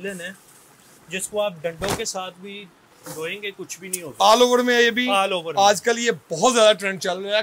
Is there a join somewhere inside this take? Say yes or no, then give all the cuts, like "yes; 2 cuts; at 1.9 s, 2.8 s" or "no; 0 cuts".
no; 0 cuts